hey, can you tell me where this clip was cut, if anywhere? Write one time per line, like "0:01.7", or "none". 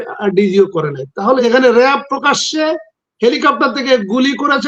0:01.4